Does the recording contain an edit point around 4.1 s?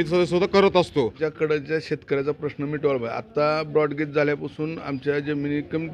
no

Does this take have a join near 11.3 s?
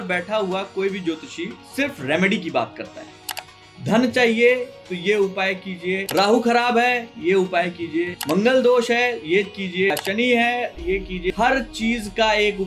yes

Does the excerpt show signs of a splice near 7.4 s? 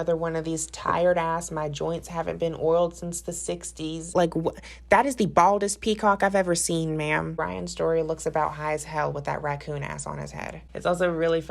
yes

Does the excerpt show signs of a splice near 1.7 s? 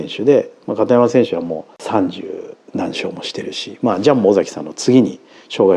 yes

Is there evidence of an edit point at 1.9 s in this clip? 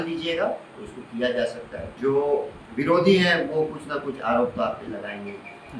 yes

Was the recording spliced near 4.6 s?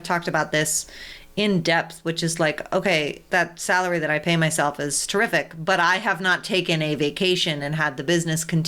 no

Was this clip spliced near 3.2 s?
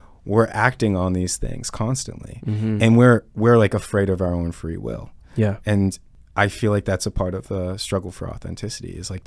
no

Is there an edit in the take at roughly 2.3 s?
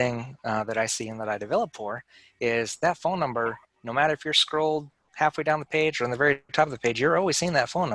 no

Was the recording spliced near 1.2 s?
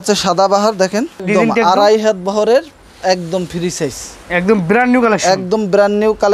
yes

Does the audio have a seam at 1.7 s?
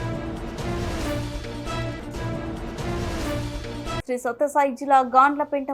no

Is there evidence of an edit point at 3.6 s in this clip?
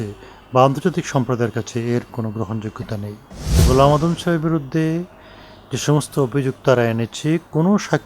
yes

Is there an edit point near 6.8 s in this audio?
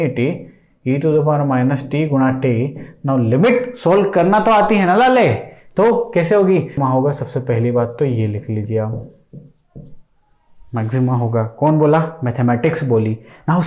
yes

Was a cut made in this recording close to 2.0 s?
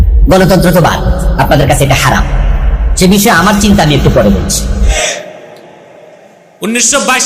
no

